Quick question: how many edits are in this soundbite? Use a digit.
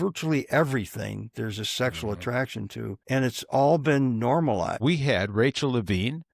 2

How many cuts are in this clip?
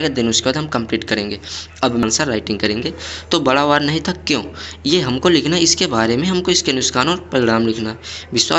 1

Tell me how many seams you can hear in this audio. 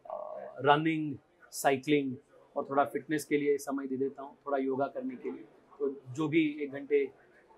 0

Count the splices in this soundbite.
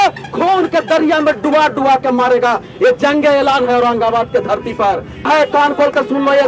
1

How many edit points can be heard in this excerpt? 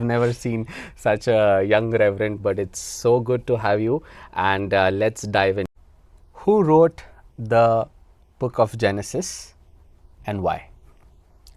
0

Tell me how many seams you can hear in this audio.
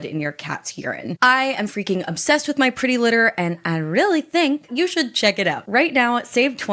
3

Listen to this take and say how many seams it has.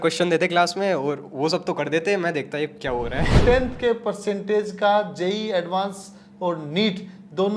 1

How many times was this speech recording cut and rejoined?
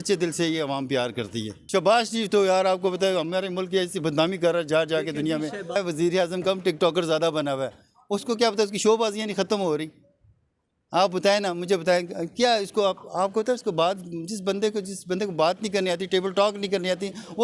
2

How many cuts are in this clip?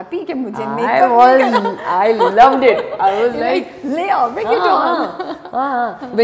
0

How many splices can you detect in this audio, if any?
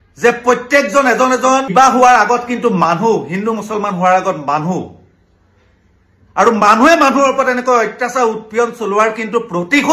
1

